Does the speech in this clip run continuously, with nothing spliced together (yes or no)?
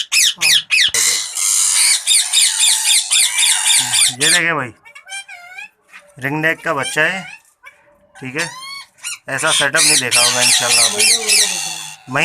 no